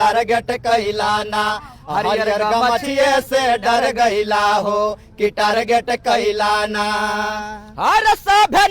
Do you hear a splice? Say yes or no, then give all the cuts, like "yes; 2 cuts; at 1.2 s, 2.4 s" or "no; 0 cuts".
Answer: no; 0 cuts